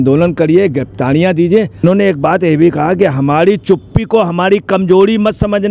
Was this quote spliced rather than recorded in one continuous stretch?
yes; 1 cut; at 1.8 s

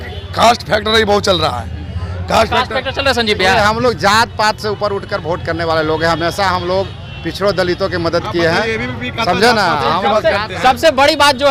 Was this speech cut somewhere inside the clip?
no; 0 cuts

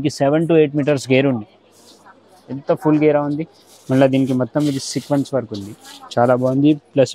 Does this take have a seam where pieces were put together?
no; 0 cuts

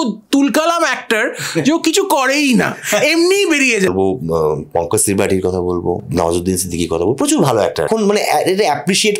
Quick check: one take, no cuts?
no; 3 cuts; at 3.9 s, 6.0 s, 7.9 s

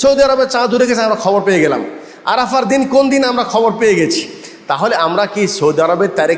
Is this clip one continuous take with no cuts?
yes; 0 cuts

